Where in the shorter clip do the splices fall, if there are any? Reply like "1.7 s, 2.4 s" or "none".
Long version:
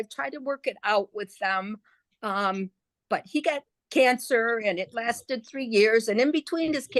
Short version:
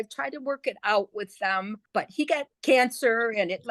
2.3 s